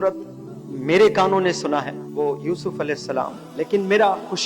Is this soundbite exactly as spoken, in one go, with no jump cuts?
no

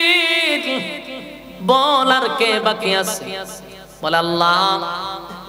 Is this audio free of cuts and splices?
yes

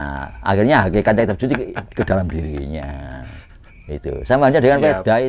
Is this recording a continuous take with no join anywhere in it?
yes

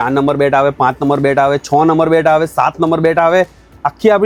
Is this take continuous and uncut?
yes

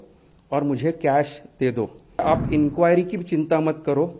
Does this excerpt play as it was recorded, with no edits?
no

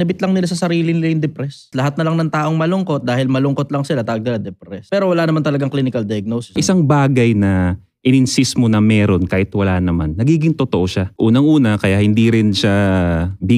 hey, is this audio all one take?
no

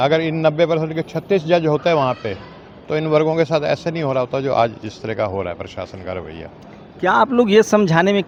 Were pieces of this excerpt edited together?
no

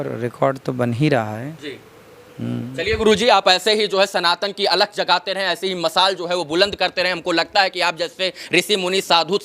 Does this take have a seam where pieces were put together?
no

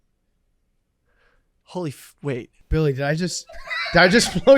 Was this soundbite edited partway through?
yes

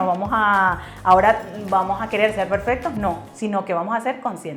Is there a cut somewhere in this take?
no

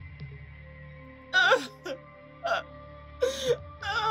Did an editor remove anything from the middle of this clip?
yes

